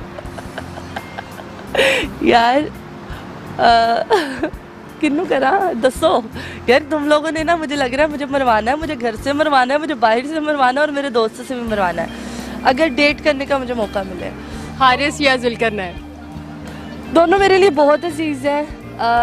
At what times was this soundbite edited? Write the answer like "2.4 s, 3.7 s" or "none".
none